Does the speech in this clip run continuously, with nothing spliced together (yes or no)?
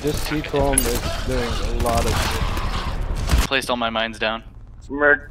no